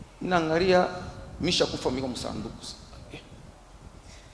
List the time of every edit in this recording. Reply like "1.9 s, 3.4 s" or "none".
none